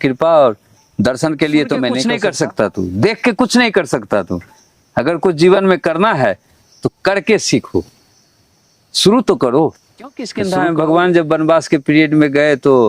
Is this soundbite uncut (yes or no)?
no